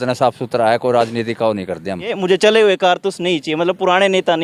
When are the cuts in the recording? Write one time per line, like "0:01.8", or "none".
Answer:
0:02.1